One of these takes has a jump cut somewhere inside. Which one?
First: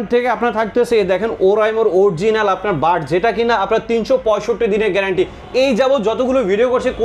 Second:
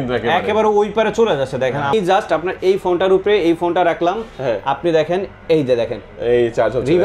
second; 1 cut; at 1.9 s

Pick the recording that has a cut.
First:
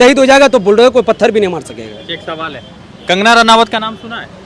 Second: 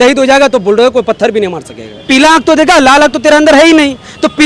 second; 1 cut; at 2.1 s

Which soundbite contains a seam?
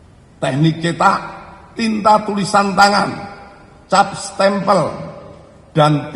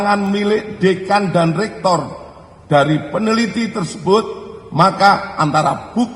first; 1 cut; at 1.7 s

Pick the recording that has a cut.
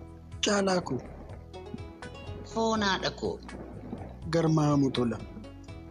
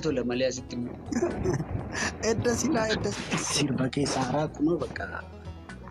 second; 1 cut; at 3.2 s

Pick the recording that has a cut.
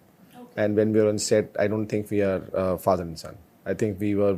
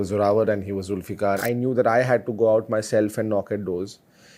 second; 1 cut; at 1.4 s

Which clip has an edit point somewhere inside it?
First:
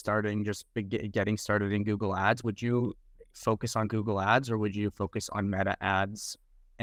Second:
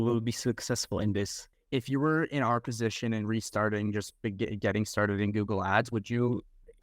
second; 1 cut; at 1.5 s

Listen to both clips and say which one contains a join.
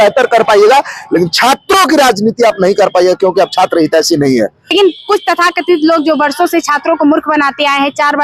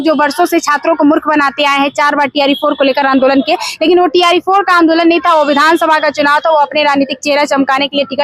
first; 1 cut; at 4.7 s

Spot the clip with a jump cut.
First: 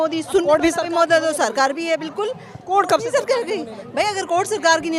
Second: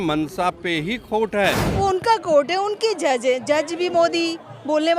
second; 1 cut; at 1.8 s

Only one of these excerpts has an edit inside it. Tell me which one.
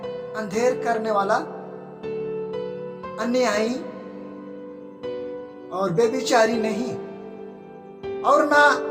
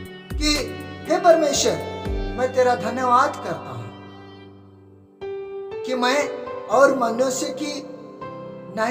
first; 2 cuts; at 3.9 s, 5.7 s

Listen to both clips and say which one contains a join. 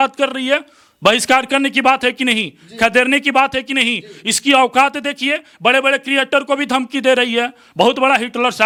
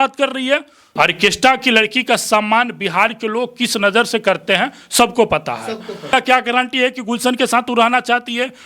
second; 2 cuts; at 0.9 s, 6.1 s

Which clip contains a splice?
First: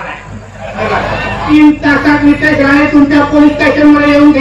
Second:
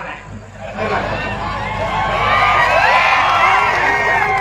first; 1 cut; at 1.4 s

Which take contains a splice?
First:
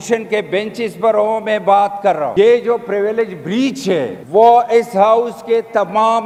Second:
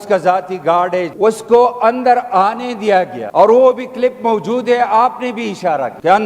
second; 1 cut; at 1.1 s

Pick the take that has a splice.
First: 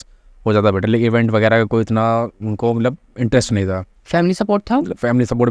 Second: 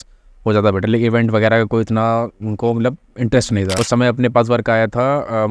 second; 1 cut; at 3.8 s

